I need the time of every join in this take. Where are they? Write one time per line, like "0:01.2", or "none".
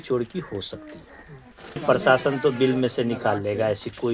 0:01.8